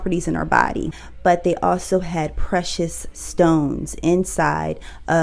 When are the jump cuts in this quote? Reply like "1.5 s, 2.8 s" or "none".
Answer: 0.9 s